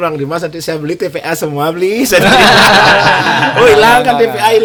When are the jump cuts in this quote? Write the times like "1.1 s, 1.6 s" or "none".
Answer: none